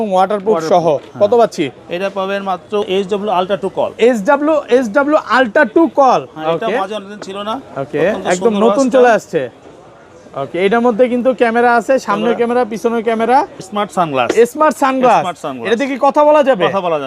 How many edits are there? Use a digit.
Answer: 2